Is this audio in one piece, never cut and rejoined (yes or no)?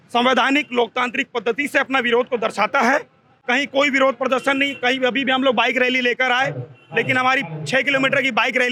yes